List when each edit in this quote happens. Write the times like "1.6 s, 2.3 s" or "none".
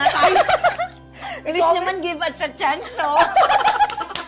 none

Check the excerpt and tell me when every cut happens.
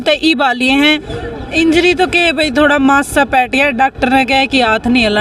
1.0 s

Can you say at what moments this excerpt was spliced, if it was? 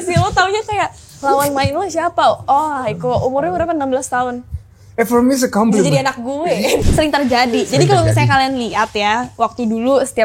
6.8 s

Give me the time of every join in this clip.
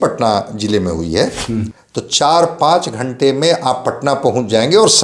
1.7 s

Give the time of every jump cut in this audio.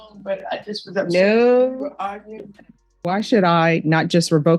3.1 s

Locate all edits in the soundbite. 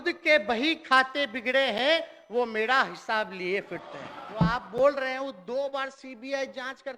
4.4 s

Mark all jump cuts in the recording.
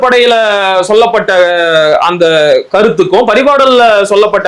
none

